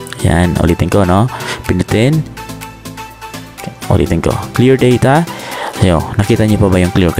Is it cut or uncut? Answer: uncut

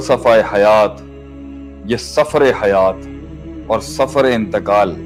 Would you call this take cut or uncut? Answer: uncut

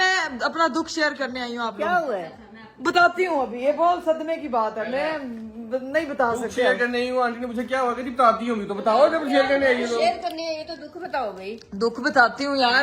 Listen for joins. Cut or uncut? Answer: uncut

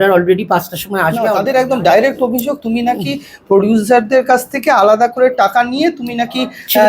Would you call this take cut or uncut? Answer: cut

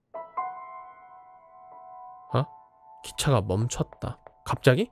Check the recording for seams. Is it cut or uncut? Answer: uncut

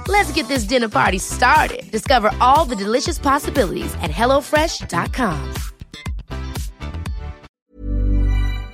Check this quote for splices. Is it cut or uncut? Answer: cut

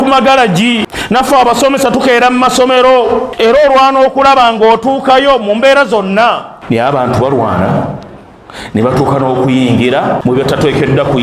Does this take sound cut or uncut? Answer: cut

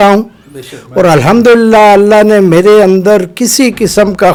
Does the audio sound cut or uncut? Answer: uncut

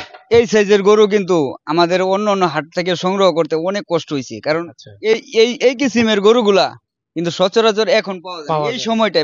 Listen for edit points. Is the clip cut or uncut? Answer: uncut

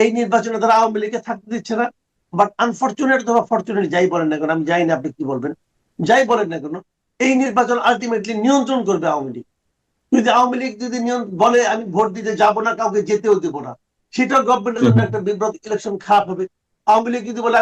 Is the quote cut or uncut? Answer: uncut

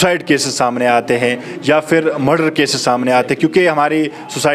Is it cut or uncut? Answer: uncut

